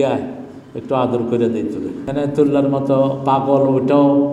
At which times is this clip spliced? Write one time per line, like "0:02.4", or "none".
0:02.0

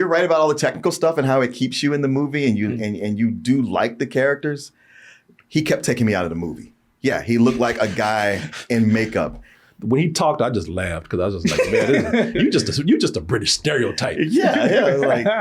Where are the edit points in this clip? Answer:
0:09.5

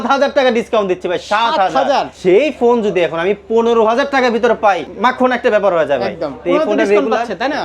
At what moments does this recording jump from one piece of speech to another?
0:02.1
0:04.9

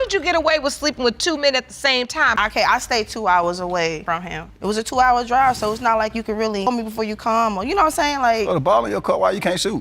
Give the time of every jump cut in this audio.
none

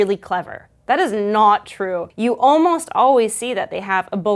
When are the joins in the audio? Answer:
0:02.1

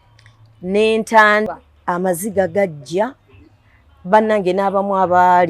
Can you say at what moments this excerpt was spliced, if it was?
0:01.6

